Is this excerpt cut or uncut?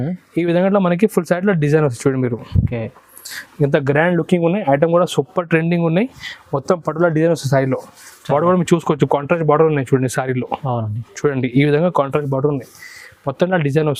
uncut